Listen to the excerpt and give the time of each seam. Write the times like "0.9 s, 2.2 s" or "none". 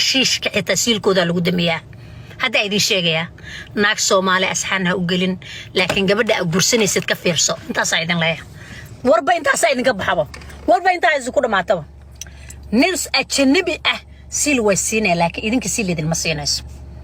none